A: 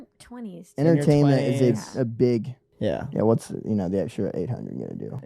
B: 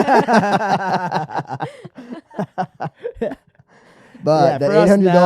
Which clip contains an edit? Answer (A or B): A